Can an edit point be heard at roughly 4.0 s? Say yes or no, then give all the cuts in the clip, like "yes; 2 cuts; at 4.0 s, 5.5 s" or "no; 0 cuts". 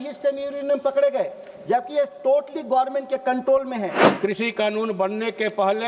yes; 1 cut; at 4.0 s